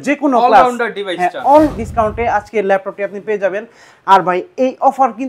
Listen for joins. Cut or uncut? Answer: cut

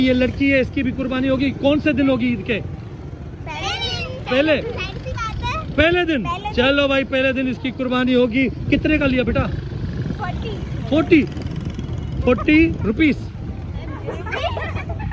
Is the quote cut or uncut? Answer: uncut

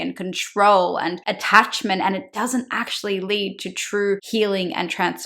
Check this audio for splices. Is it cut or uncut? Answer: cut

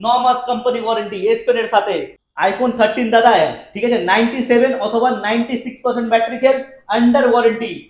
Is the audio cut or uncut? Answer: cut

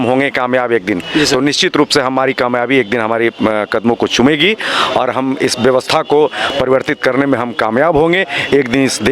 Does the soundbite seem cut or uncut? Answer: uncut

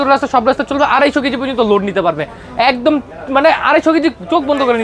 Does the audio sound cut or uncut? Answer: uncut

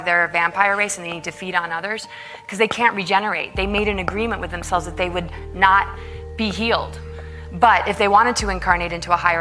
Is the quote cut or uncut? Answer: uncut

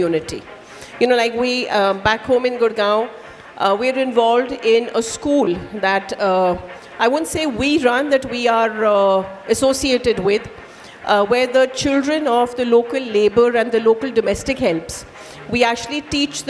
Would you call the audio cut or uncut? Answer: uncut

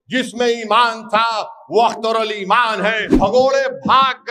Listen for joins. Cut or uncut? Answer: cut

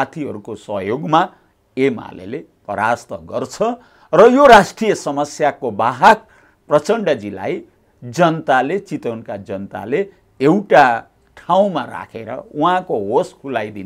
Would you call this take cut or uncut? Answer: uncut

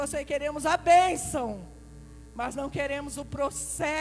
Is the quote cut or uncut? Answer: uncut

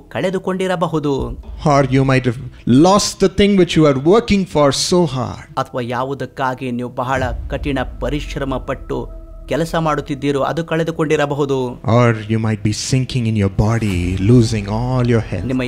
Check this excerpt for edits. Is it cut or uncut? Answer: uncut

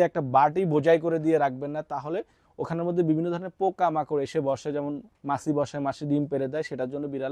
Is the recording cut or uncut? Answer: uncut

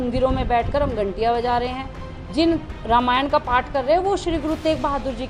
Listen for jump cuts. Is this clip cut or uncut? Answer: uncut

